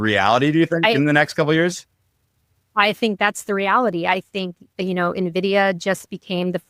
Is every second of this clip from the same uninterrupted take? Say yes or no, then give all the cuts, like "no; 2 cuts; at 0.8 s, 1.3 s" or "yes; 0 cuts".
yes; 0 cuts